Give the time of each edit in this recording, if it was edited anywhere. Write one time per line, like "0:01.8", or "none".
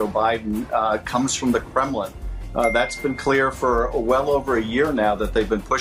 none